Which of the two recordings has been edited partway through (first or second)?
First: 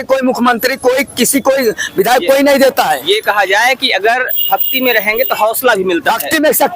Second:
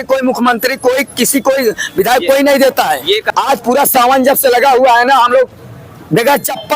second